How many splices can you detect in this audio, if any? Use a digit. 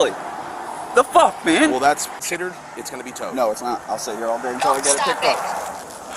1